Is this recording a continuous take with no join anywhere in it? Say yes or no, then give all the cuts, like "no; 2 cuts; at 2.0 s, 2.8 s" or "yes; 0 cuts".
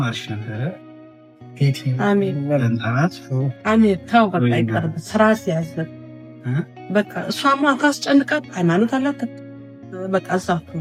yes; 0 cuts